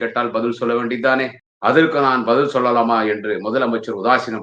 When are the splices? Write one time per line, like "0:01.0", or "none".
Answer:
0:01.4